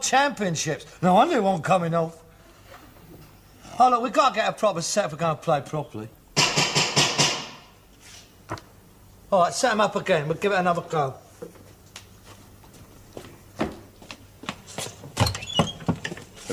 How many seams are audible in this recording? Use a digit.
0